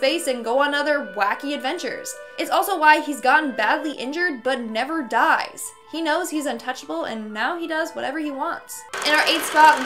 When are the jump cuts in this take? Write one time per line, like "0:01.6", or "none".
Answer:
0:08.9